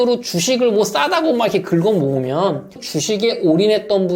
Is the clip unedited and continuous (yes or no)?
no